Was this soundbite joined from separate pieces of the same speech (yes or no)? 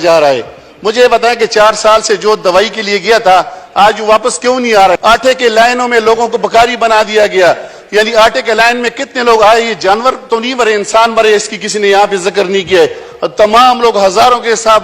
yes